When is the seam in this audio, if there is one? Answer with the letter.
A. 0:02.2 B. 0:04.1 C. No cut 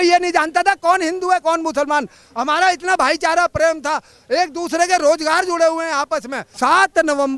C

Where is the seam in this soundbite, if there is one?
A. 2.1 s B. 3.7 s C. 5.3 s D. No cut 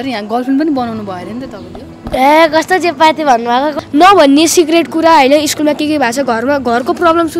B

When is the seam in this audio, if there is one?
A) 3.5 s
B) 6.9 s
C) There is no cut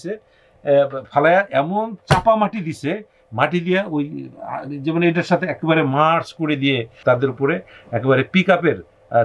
B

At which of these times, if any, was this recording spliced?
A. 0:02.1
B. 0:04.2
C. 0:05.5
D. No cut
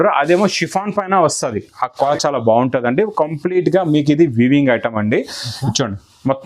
A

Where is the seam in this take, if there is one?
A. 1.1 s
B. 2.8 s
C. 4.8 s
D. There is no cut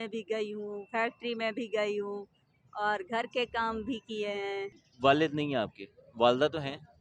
C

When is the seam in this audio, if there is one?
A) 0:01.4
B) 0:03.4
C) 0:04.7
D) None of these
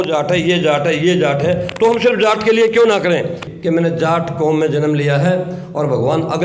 B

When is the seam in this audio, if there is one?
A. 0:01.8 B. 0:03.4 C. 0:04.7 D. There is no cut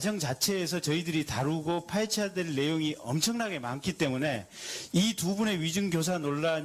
C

